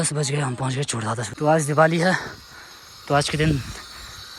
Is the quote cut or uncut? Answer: cut